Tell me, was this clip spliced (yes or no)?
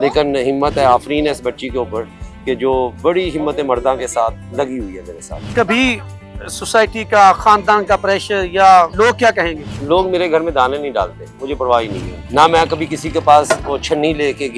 no